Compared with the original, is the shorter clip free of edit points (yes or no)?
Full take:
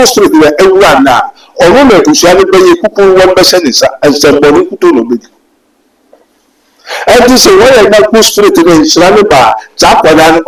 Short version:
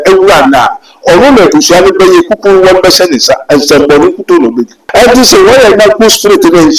no